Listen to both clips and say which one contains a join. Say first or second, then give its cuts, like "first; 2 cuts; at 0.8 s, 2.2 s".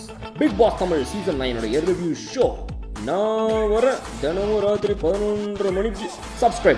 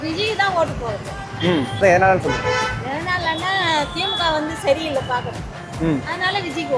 second; 1 cut; at 1.8 s